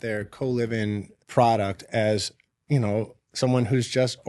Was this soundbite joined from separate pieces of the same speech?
yes; 1 cut; at 1.2 s

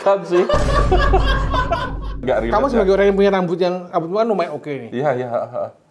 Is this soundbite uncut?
no; 1 cut; at 2.2 s

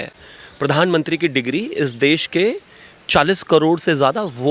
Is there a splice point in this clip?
no; 0 cuts

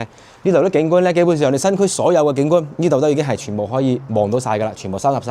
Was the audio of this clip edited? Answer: no; 0 cuts

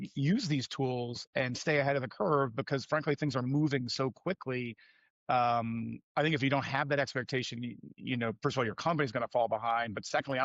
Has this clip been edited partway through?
no; 0 cuts

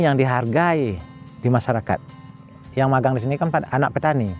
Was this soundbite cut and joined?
yes; 1 cut; at 2.6 s

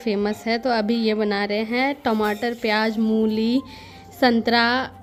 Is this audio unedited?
yes; 0 cuts

